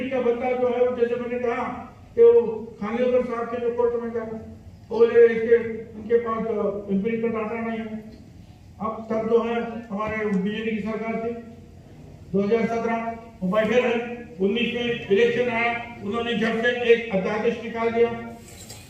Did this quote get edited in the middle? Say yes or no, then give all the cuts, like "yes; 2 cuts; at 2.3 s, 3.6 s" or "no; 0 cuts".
no; 0 cuts